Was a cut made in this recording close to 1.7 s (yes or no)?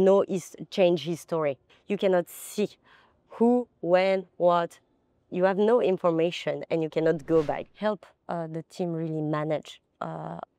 yes